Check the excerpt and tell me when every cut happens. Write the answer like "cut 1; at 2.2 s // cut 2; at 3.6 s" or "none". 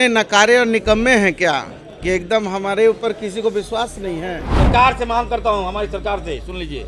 cut 1; at 4.4 s